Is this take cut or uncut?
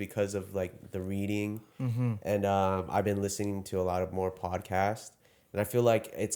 uncut